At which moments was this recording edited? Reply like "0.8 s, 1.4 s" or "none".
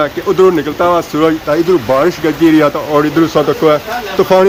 none